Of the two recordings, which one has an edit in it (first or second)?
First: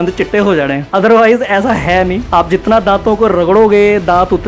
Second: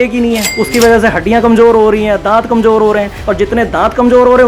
first